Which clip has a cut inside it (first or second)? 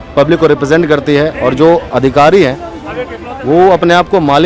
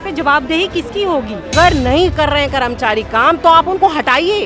second